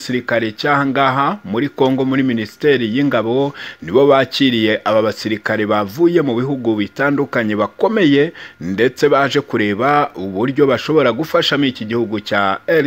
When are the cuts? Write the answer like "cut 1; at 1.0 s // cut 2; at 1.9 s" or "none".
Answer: none